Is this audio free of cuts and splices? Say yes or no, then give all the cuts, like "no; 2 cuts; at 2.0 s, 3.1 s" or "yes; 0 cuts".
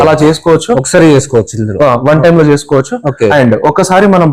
yes; 0 cuts